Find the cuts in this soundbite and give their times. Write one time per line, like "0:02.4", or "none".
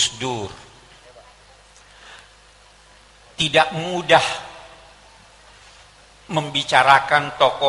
0:01.0